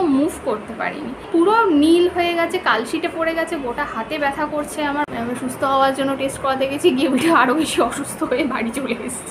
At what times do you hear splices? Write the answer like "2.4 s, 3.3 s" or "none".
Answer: 1.2 s, 5.0 s